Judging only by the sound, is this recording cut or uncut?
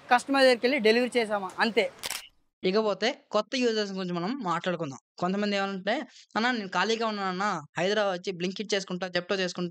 cut